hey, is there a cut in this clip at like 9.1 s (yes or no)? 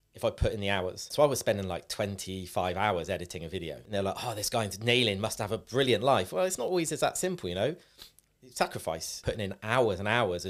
yes